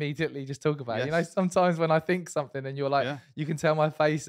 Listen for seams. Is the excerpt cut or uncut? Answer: uncut